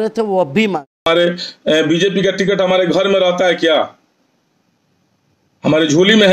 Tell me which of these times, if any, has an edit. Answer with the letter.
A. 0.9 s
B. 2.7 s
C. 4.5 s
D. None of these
A